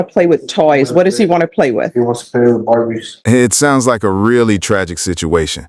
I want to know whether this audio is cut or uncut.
uncut